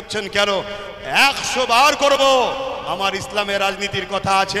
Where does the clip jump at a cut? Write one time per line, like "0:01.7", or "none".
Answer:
none